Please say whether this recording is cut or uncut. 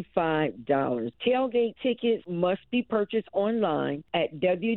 cut